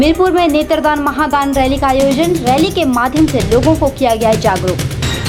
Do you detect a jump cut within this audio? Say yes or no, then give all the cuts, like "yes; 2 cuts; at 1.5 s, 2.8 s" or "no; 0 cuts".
no; 0 cuts